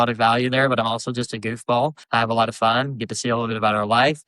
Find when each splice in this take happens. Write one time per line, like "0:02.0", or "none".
0:02.0